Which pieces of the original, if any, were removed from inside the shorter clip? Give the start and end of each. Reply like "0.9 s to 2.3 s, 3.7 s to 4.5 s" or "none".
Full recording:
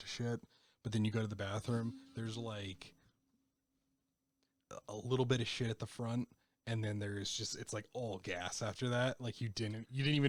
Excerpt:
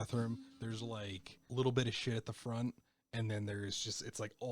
3.0 s to 5.0 s